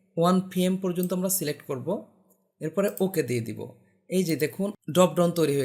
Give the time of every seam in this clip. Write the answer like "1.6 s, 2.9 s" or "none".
4.8 s